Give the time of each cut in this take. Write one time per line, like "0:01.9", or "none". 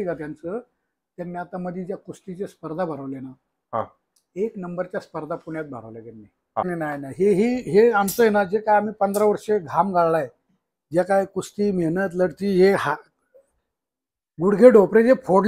0:06.7